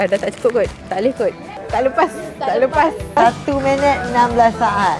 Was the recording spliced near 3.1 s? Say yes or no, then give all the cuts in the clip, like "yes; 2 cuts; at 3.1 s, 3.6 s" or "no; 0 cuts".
yes; 1 cut; at 3.1 s